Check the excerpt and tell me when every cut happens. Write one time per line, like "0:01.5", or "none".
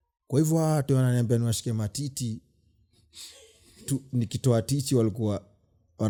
none

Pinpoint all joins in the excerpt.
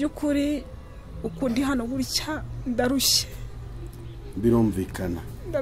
none

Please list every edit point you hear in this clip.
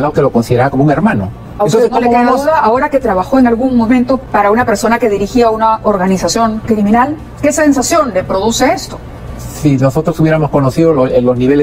0:01.5
0:04.2

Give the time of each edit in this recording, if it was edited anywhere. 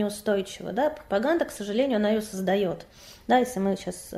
none

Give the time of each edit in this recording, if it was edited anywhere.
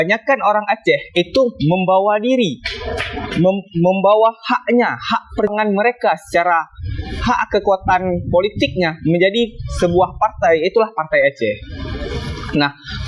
0:05.5

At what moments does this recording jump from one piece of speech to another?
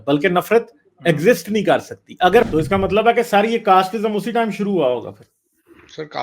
0:02.5

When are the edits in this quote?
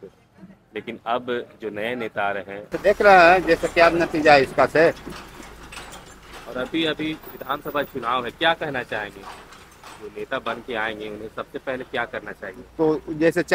0:02.8

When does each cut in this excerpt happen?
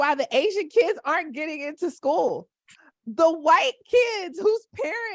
none

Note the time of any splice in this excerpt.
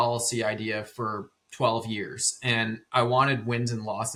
none

